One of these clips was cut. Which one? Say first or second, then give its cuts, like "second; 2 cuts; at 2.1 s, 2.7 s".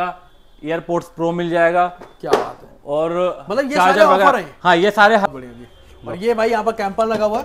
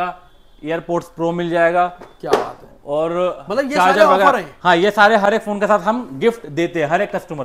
first; 1 cut; at 5.3 s